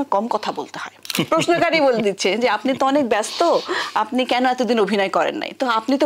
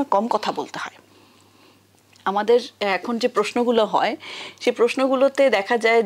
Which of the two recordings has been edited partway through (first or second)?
first